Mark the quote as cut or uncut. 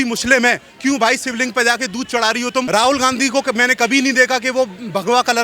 cut